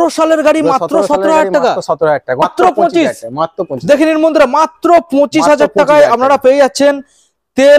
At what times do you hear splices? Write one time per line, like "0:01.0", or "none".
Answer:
0:02.4